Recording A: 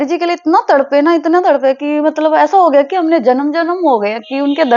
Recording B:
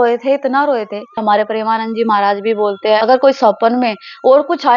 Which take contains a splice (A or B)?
B